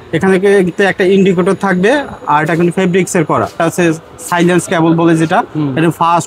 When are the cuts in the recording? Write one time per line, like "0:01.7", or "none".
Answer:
0:03.6